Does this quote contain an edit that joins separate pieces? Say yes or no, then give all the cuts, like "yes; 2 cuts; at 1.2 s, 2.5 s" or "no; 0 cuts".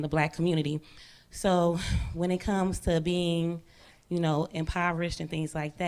no; 0 cuts